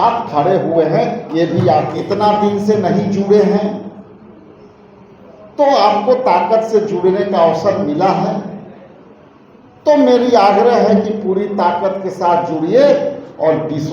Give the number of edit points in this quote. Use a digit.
1